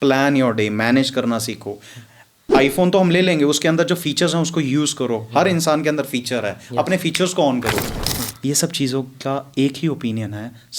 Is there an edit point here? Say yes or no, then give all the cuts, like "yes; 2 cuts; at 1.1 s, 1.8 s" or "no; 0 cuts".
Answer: yes; 1 cut; at 7.9 s